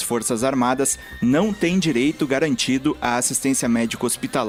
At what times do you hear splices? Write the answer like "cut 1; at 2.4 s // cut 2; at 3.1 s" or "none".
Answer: none

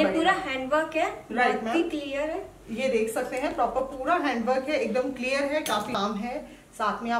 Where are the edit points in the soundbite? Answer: cut 1; at 5.9 s

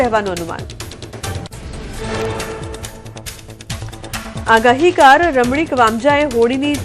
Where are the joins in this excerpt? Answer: cut 1; at 1.8 s

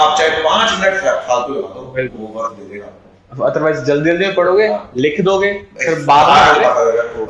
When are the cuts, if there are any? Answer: none

